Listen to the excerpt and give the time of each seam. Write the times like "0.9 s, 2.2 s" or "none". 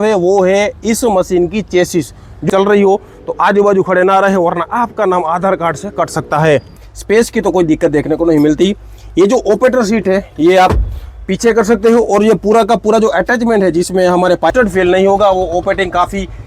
2.5 s, 6.6 s, 14.5 s

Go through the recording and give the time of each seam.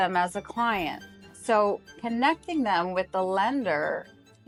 none

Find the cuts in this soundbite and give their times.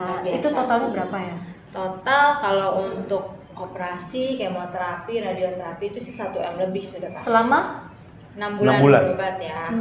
none

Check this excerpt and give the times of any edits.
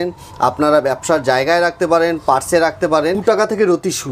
3.2 s

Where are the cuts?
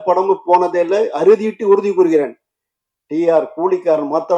none

